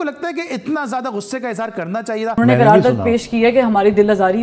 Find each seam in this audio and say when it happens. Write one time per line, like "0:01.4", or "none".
0:02.4

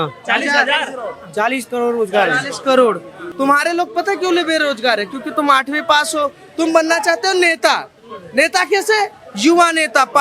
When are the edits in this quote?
0:03.2

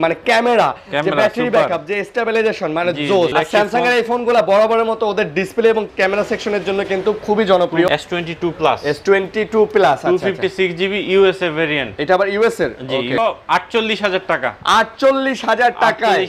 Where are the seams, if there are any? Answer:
0:03.3
0:07.9
0:13.2

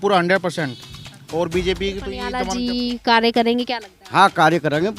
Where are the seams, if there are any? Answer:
0:02.3

